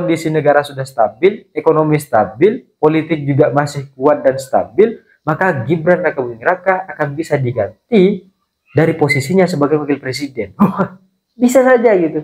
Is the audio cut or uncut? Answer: uncut